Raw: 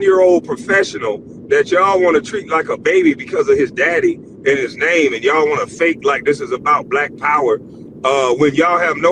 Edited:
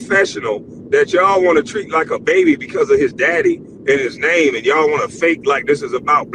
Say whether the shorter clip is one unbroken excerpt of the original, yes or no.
yes